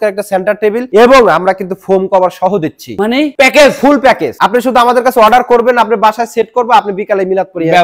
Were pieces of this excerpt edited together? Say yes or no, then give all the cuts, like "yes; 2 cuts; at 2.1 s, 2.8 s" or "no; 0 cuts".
no; 0 cuts